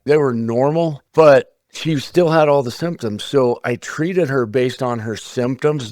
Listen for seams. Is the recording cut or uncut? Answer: cut